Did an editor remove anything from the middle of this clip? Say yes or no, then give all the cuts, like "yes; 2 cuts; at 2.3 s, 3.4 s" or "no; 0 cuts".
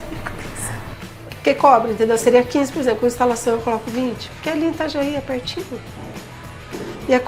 yes; 1 cut; at 0.9 s